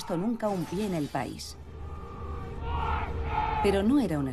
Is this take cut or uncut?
uncut